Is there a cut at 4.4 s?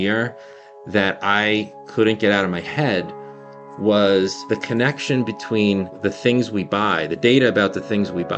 yes; 2 cuts; at 4.4 s, 6.0 s

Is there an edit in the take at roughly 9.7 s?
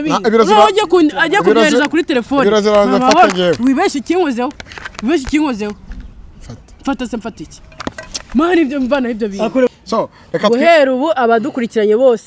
yes; 1 cut; at 9.7 s

